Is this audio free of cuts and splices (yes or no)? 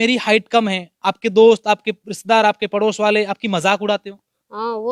yes